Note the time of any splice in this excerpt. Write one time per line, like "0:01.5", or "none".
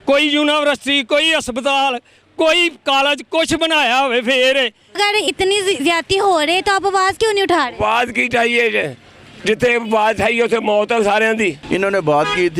0:05.0
0:11.6